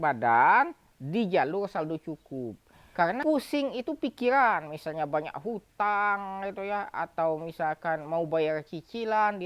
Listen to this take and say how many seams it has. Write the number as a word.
one